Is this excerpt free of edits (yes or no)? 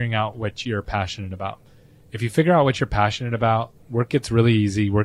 yes